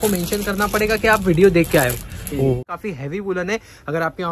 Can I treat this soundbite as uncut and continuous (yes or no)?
no